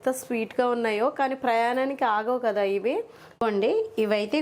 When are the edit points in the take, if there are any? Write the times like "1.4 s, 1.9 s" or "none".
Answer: 3.2 s